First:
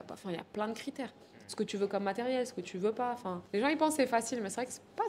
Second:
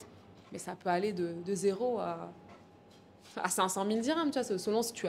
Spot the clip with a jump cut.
first; 1 cut; at 3.4 s

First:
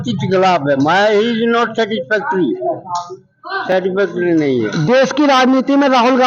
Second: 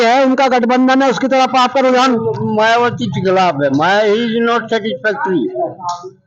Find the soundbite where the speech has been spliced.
first; 1 cut; at 4.7 s

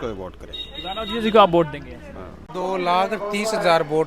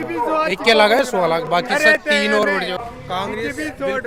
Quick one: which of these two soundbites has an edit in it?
first; 1 cut; at 2.5 s

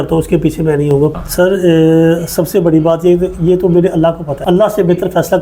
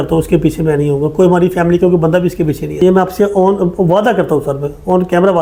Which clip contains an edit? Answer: first; 1 cut; at 1.1 s

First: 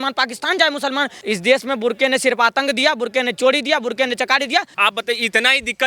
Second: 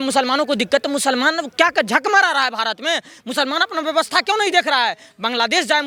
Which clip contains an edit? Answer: first; 2 cuts; at 1.2 s, 4.8 s

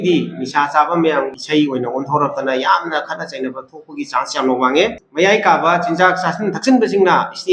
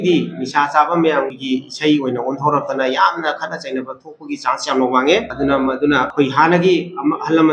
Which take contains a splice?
first; 2 cuts; at 1.4 s, 5.0 s

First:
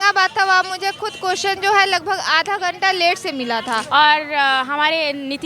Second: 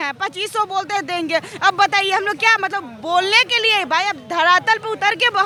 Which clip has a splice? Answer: first; 1 cut; at 3.8 s

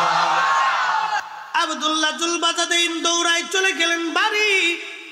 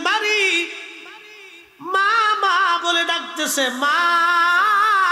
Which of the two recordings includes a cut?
first; 1 cut; at 1.3 s

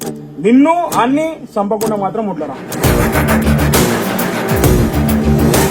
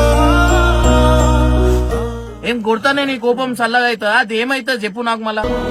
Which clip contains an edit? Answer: second; 1 cut; at 2.3 s

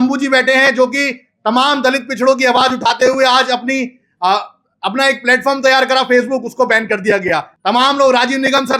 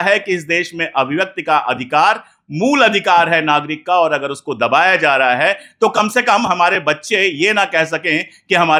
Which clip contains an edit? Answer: first; 1 cut; at 7.5 s

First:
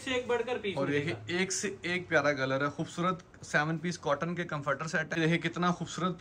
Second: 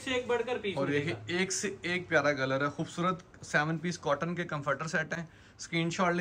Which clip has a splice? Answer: first; 1 cut; at 5.2 s

